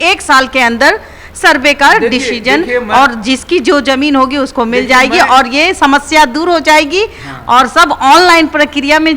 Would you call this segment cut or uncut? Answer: uncut